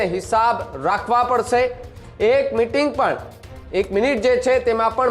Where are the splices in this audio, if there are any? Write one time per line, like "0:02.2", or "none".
none

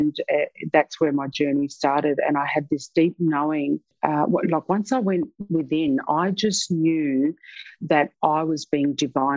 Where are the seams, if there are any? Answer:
0:03.9

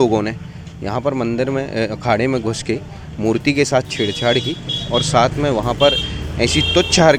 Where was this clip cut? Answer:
none

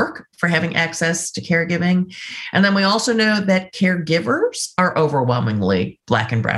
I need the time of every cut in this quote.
none

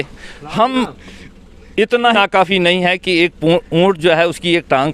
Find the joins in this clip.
0:02.1

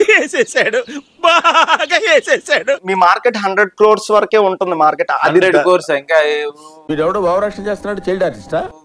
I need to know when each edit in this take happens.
0:02.8

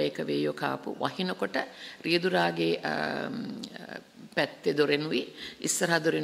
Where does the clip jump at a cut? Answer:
none

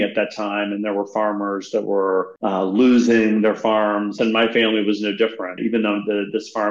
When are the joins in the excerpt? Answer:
0:02.3
0:04.1
0:05.6

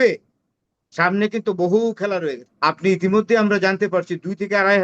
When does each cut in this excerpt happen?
0:02.4

